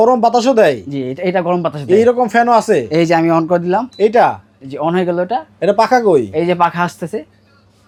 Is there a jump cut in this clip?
no; 0 cuts

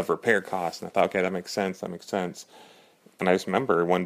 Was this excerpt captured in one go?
yes; 0 cuts

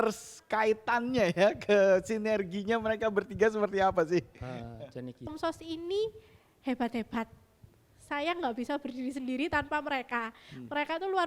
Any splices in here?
yes; 1 cut; at 5.3 s

